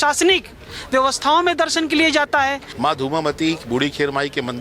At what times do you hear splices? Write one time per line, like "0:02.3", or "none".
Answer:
0:02.7